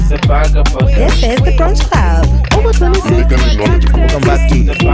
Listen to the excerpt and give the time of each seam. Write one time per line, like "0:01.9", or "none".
none

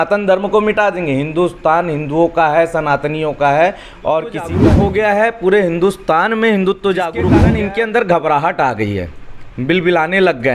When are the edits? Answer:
0:04.5
0:07.4

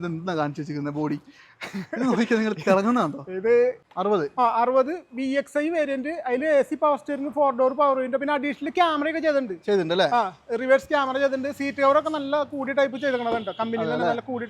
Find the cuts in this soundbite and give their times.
0:03.9

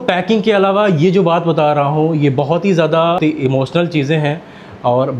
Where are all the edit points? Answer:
0:03.2

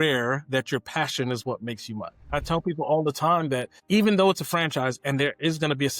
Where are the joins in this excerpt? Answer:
0:02.4
0:03.7

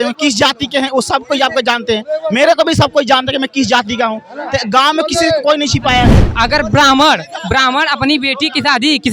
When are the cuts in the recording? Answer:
0:06.2

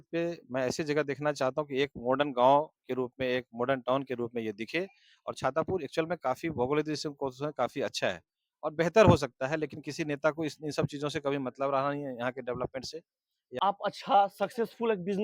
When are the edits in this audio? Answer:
0:13.6

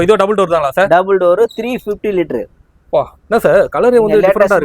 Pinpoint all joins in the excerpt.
none

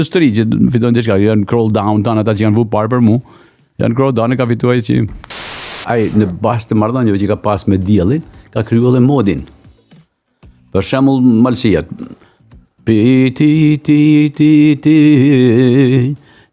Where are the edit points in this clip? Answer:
0:05.8

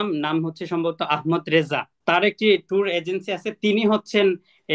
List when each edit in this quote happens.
0:01.9

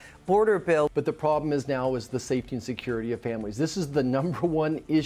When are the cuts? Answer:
0:00.9

